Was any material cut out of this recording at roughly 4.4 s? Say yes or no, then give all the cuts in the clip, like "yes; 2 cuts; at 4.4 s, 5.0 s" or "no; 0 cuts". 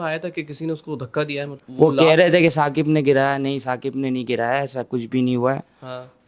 no; 1 cut; at 1.6 s